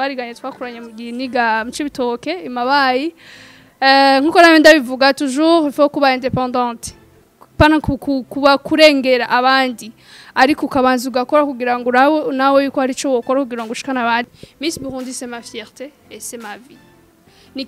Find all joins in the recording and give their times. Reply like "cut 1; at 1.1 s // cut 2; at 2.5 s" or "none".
cut 1; at 14.3 s